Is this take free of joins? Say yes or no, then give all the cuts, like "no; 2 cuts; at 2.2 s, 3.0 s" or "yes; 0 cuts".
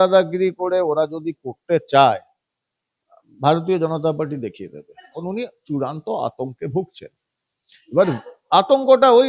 no; 1 cut; at 5.1 s